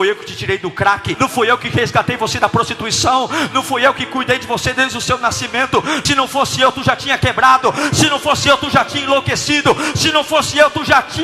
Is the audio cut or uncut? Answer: cut